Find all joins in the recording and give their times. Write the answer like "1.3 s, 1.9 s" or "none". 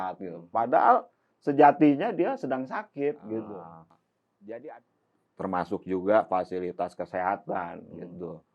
4.7 s